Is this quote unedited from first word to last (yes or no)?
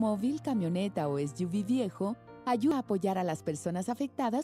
no